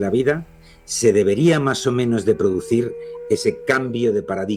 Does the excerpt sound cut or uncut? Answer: uncut